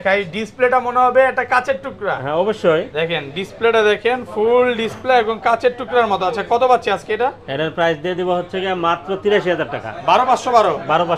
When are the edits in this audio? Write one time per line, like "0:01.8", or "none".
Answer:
none